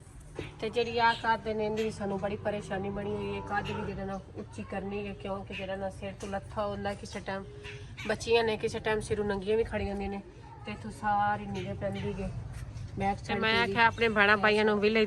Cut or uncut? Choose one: cut